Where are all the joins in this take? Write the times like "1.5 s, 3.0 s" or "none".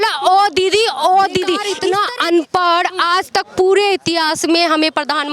1.7 s